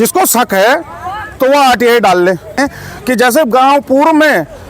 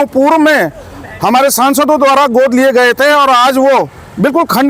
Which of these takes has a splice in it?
first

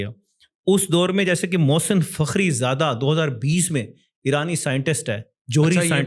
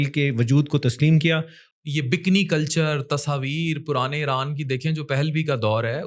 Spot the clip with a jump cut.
second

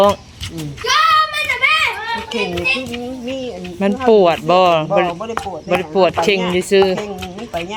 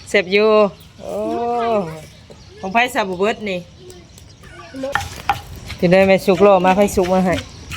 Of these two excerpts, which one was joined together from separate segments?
second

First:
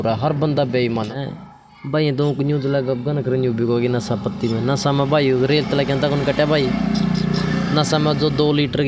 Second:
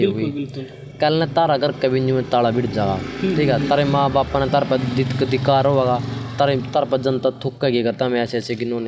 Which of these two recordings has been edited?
first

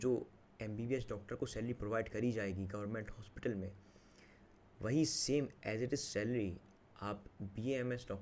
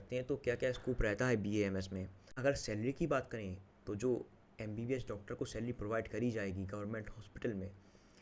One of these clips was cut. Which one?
second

